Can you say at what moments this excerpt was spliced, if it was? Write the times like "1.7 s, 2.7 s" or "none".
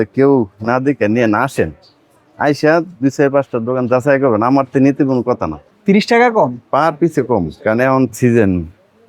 5.6 s